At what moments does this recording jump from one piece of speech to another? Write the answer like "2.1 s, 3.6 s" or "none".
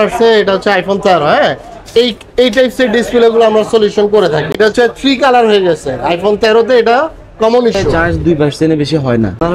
4.5 s, 7.8 s